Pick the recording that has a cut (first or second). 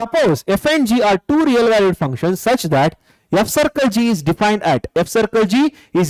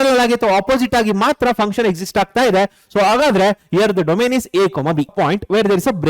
second